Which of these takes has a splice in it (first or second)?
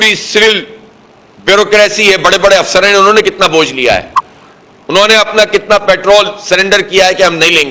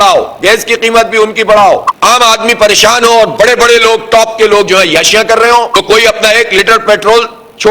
second